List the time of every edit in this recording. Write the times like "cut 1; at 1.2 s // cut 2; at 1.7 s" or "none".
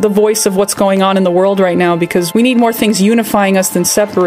cut 1; at 2.3 s